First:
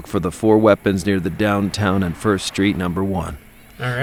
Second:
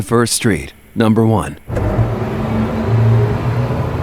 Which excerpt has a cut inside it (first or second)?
second